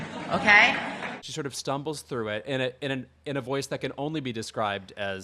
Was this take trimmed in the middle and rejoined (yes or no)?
no